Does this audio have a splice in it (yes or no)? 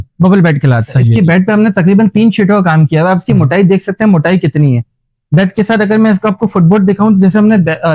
no